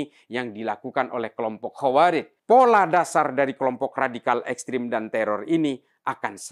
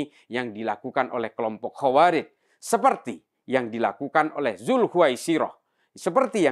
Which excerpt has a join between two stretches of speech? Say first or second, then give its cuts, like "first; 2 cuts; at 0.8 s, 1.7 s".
first; 1 cut; at 2.3 s